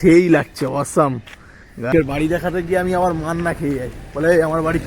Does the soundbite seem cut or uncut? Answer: cut